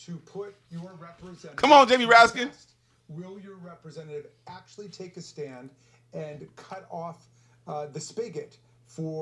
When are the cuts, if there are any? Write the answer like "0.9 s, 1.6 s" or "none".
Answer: none